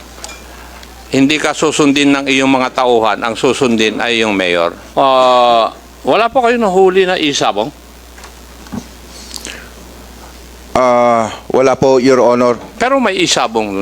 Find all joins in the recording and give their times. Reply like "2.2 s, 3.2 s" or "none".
4.8 s, 12.7 s